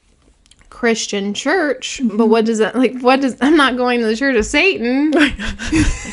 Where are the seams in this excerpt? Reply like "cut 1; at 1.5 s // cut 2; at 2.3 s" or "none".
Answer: none